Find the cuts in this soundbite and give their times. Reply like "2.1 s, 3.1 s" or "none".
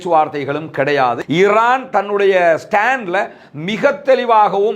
1.2 s